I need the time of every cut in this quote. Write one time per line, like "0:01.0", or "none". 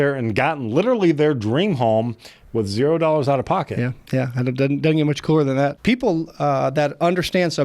0:05.8